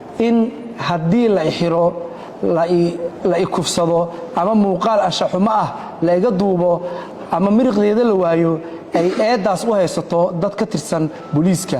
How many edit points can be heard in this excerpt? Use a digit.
1